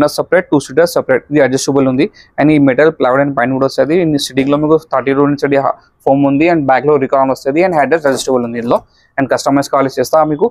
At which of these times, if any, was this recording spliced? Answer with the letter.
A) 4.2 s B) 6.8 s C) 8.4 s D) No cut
D